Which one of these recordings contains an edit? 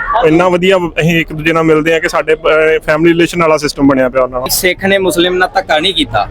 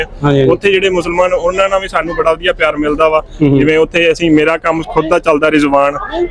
first; 1 cut; at 4.5 s

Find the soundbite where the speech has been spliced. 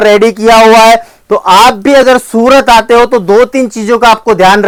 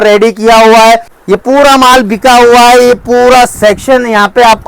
second; 1 cut; at 1.1 s

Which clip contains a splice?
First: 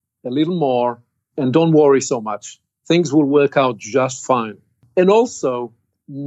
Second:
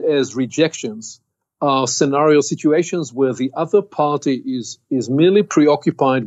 first; 2 cuts; at 1.2 s, 4.8 s

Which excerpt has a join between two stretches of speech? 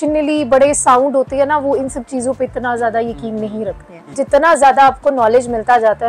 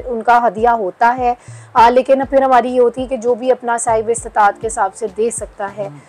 first; 1 cut; at 4.1 s

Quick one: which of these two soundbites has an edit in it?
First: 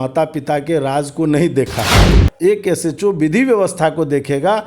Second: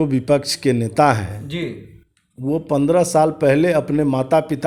first; 1 cut; at 2.2 s

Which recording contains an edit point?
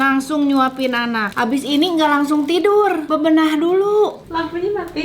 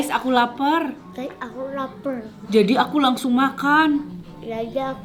first; 3 cuts; at 1.3 s, 3.0 s, 4.2 s

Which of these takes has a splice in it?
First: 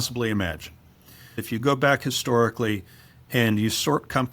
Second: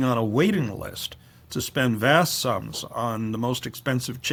first; 1 cut; at 1.4 s

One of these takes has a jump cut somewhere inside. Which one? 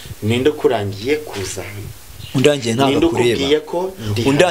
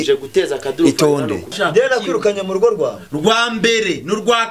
second; 1 cut; at 1.5 s

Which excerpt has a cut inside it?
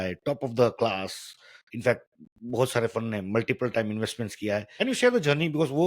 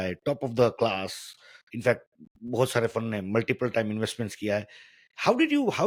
first; 1 cut; at 4.7 s

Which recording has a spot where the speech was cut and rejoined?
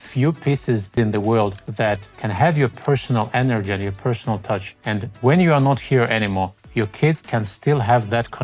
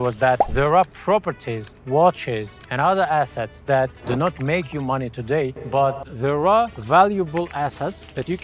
first; 4 cuts; at 0.9 s, 1.9 s, 4.7 s, 6.6 s

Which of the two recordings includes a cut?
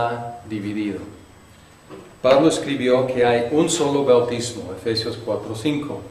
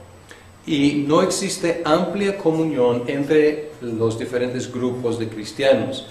second; 1 cut; at 4.6 s

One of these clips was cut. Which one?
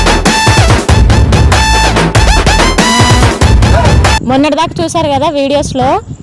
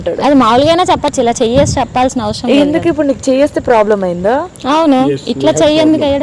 first; 1 cut; at 4.1 s

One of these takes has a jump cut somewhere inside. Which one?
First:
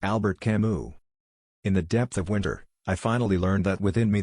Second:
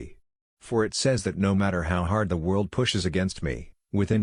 first; 1 cut; at 1.0 s

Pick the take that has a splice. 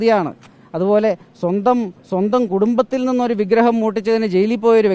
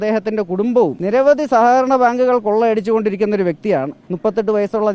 second; 2 cuts; at 1.0 s, 4.0 s

